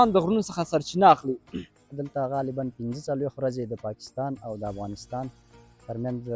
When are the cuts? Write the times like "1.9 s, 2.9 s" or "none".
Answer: 2.0 s